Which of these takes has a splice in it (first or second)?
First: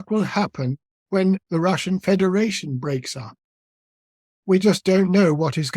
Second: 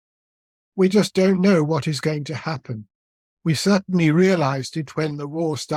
first